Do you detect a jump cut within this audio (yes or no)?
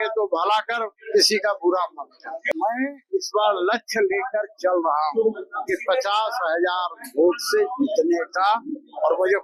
yes